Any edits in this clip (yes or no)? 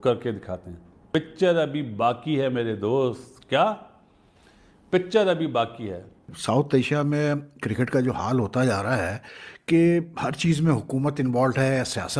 yes